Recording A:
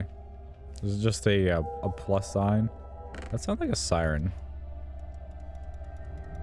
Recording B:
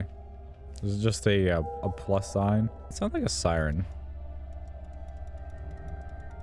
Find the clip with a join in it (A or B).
B